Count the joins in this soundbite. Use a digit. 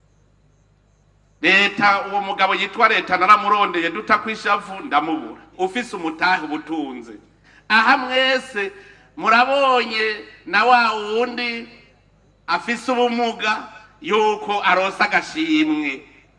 1